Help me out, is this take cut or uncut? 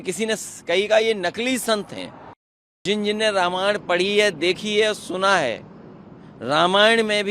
cut